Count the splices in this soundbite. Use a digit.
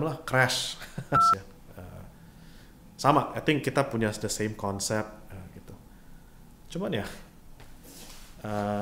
1